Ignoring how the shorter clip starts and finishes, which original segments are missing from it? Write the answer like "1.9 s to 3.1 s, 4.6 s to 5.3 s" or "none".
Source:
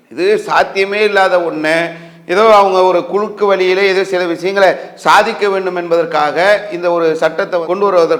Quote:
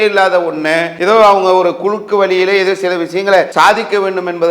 1.9 s to 2.2 s, 4.8 s to 5.0 s